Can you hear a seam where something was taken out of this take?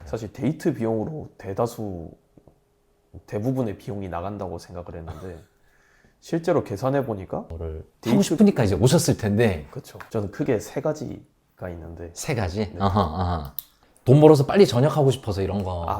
yes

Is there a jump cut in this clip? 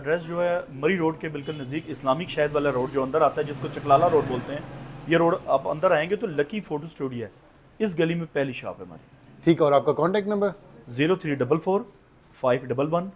no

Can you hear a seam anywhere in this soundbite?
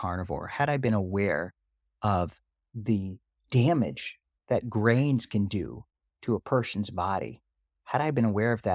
no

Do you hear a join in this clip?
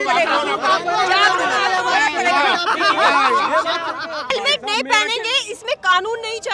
yes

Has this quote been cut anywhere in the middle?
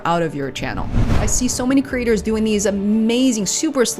yes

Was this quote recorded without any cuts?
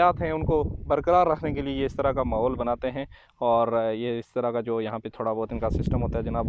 yes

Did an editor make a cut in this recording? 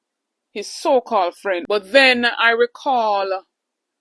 yes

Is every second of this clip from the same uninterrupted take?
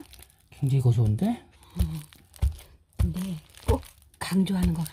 yes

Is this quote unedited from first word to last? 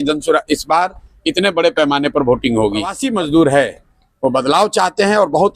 no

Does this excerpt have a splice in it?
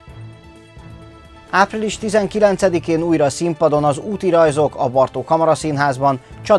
yes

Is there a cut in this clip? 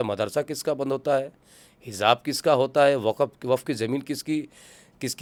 no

